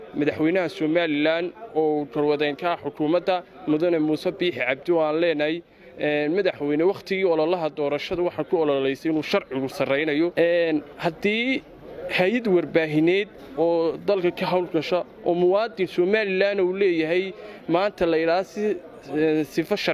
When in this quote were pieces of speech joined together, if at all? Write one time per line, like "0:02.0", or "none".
0:10.3
0:13.4